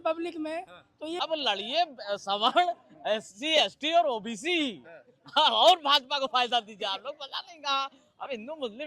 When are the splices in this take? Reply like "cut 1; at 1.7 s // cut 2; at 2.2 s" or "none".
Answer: cut 1; at 1.2 s